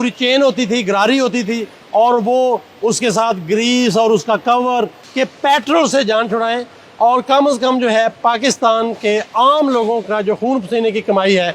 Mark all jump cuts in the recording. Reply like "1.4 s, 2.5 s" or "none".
5.0 s